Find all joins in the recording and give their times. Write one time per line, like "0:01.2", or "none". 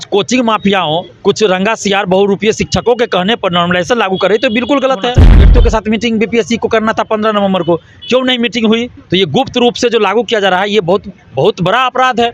0:01.1
0:05.5
0:08.9
0:11.2